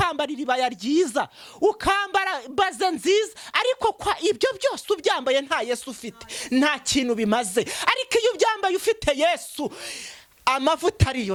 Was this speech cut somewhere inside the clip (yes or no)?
no